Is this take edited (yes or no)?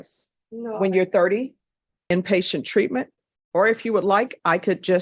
yes